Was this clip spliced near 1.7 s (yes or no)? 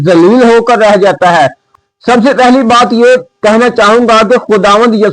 yes